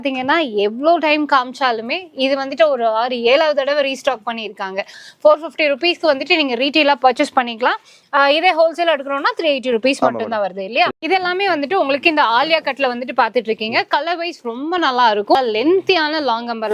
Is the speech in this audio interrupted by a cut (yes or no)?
yes